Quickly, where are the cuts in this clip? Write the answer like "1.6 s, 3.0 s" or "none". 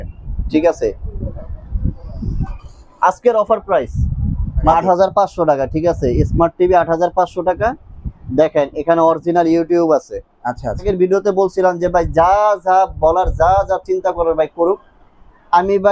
4.7 s, 10.8 s